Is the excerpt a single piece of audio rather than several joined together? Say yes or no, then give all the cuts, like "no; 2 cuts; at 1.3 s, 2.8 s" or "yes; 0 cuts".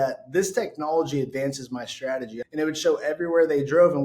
no; 1 cut; at 2.3 s